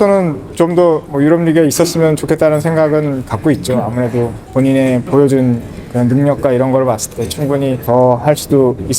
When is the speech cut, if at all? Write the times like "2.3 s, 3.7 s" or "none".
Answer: 1.1 s, 4.4 s, 7.8 s